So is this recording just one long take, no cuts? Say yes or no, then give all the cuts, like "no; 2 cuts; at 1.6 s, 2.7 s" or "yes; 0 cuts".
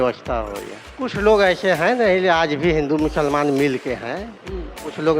no; 1 cut; at 1.1 s